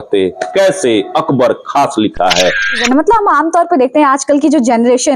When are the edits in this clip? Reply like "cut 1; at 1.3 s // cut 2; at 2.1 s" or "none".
cut 1; at 2.8 s